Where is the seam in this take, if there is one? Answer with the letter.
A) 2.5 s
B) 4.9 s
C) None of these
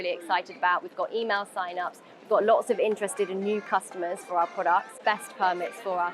B